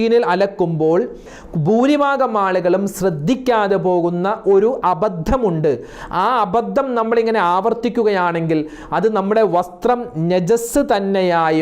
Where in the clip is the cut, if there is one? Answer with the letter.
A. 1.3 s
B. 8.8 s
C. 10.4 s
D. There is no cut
A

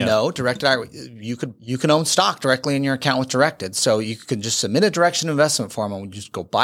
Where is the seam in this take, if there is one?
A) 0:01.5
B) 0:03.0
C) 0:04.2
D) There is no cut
A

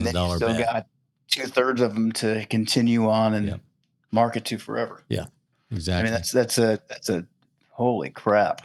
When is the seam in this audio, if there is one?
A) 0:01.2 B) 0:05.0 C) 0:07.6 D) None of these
D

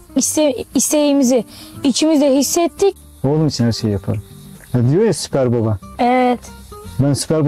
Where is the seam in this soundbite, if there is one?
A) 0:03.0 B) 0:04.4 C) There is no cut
A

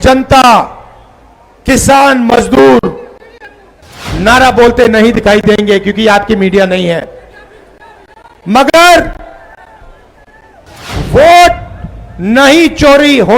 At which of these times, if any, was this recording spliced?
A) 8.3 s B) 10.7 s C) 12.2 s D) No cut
B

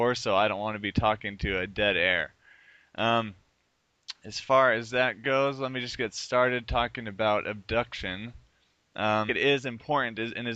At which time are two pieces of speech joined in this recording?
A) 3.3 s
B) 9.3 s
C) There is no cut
C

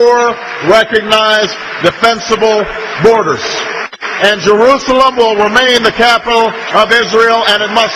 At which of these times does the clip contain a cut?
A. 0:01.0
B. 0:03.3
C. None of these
C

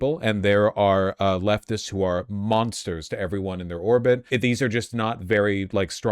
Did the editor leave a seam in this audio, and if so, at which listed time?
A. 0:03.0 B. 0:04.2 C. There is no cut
B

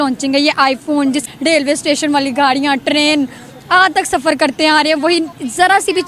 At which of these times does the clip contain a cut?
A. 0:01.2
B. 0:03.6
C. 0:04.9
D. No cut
A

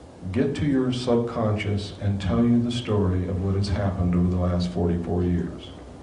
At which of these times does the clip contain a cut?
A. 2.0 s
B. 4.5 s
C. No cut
A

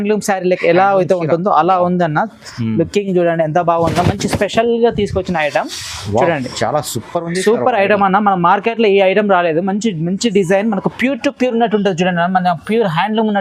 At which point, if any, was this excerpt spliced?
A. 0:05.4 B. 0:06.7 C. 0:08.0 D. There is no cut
D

